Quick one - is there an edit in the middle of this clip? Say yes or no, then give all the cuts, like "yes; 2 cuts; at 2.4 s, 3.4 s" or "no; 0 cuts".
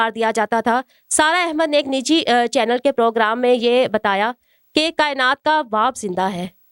no; 0 cuts